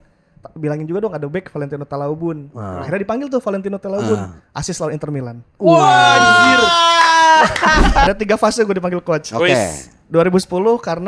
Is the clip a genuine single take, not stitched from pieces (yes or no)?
no